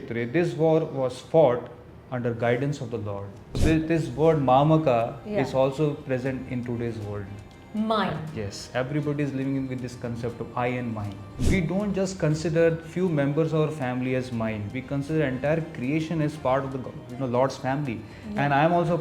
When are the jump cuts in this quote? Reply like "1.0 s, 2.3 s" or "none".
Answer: 3.5 s, 11.3 s